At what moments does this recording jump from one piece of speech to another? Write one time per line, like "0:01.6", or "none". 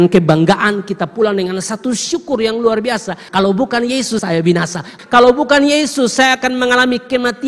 0:03.2
0:04.6